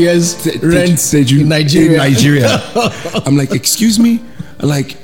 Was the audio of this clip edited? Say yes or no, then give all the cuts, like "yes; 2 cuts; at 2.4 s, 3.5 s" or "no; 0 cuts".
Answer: no; 0 cuts